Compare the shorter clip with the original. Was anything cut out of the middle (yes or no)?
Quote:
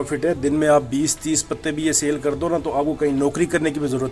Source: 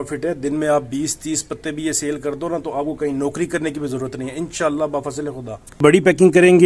no